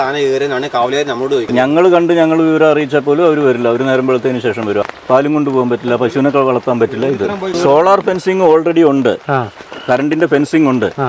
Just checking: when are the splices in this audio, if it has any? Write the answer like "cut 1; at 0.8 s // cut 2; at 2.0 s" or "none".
cut 1; at 1.5 s // cut 2; at 4.8 s // cut 3; at 7.5 s